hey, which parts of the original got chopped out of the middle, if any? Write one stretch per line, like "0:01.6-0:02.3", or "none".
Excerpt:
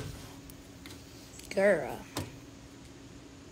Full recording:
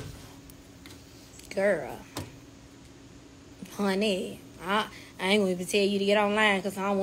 none